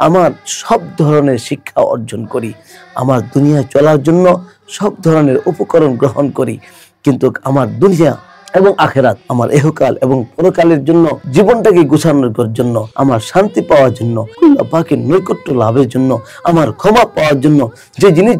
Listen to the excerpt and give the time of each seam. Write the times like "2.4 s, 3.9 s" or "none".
9.2 s, 11.2 s, 12.8 s, 14.2 s